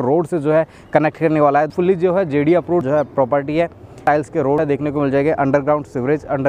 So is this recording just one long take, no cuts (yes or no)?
no